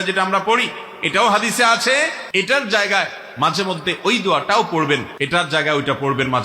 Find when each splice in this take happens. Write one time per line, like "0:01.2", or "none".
0:02.2
0:05.1